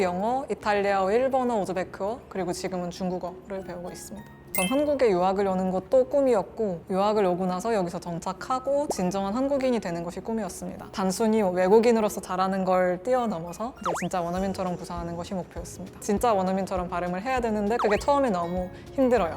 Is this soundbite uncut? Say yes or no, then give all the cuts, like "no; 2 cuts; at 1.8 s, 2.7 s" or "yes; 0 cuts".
no; 3 cuts; at 4.3 s, 10.9 s, 16.0 s